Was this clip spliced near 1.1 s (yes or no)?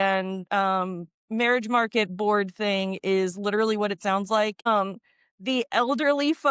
no